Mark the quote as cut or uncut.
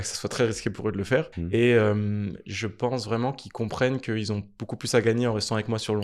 cut